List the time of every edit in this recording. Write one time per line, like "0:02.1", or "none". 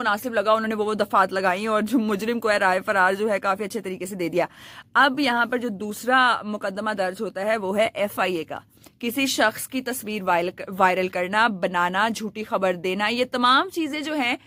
none